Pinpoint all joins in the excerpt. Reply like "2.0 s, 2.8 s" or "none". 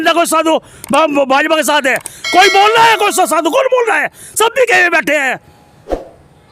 none